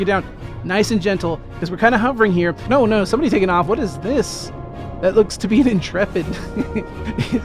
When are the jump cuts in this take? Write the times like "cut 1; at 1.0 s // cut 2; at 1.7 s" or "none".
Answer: cut 1; at 2.6 s